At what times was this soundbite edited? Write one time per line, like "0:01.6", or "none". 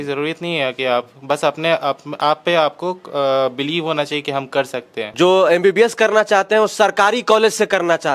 0:05.1